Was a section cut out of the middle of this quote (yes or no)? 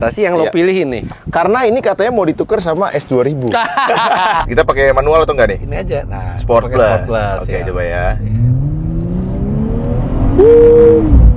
yes